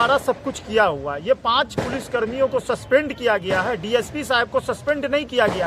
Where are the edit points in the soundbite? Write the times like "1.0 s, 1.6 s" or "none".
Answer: none